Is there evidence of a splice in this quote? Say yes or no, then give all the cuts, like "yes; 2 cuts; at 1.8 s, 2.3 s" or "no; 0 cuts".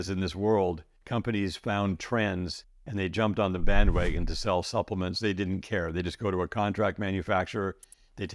yes; 1 cut; at 0.9 s